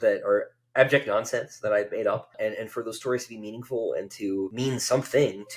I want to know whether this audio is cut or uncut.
cut